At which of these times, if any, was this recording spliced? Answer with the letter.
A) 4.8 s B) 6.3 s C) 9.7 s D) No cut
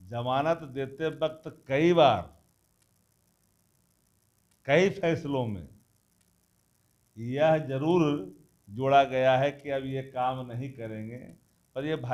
D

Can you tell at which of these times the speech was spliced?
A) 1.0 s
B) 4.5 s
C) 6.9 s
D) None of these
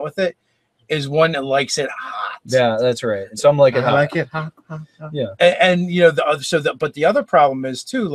C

